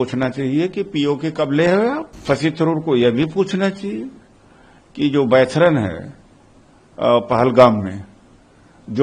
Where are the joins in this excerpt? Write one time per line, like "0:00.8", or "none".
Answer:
0:02.2